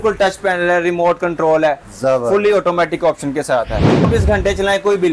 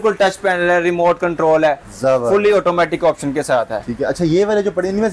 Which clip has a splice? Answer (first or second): first